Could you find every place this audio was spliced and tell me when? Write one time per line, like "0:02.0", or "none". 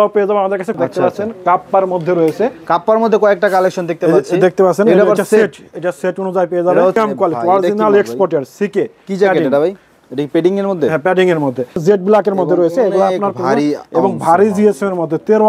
0:00.8
0:07.0
0:11.8